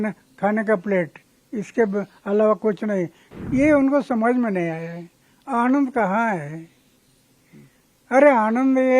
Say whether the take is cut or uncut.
cut